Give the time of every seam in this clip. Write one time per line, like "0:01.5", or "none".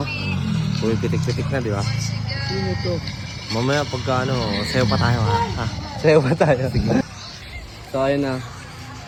none